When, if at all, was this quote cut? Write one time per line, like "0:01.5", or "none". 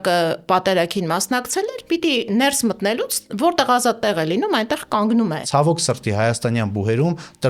0:05.4